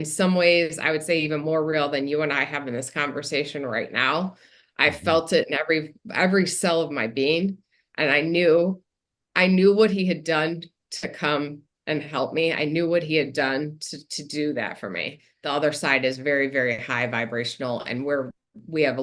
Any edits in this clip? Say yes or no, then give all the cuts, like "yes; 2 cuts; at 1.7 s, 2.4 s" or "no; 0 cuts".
yes; 1 cut; at 15.3 s